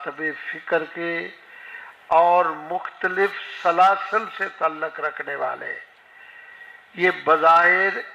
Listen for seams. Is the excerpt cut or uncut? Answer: uncut